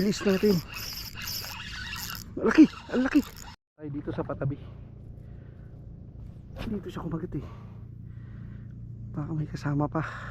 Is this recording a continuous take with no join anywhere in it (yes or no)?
no